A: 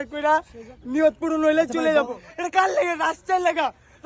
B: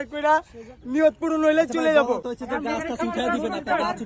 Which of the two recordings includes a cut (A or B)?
A